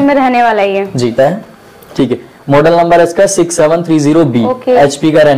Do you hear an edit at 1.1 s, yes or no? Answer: yes